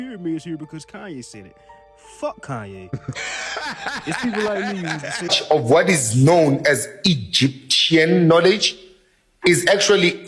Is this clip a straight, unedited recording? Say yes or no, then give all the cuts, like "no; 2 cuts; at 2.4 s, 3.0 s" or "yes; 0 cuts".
no; 1 cut; at 5.3 s